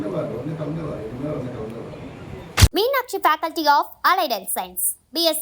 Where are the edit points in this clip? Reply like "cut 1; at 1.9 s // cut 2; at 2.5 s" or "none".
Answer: cut 1; at 2.6 s